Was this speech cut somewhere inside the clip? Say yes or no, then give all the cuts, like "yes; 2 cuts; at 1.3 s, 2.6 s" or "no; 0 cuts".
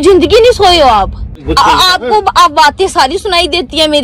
yes; 1 cut; at 1.4 s